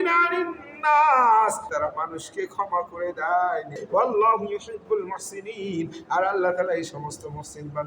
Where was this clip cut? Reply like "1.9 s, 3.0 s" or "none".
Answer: 1.7 s, 3.8 s